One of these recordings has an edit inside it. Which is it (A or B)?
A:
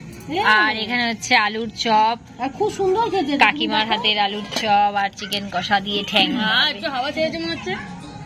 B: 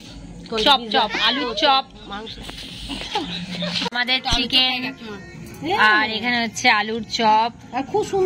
B